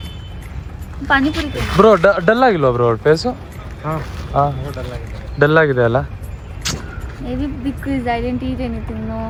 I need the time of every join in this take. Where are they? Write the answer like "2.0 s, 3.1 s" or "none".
none